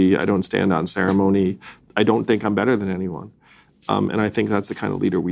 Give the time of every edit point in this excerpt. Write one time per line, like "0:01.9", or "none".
none

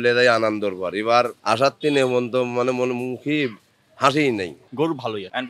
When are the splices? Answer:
0:01.4
0:04.6

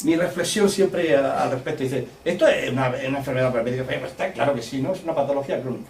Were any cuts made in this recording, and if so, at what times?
none

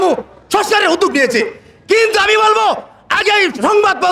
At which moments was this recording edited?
none

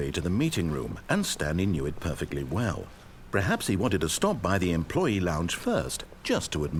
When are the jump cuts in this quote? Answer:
none

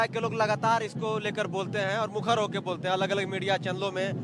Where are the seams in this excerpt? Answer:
none

